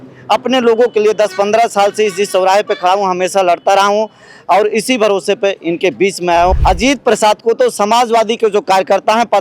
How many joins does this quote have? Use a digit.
1